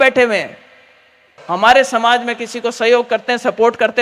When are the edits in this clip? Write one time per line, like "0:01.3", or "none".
0:01.4